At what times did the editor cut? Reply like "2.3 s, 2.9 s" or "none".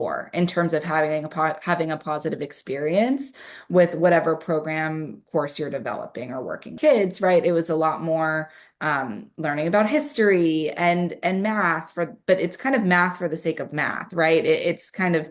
6.8 s